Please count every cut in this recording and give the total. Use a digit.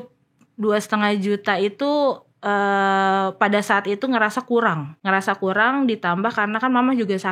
1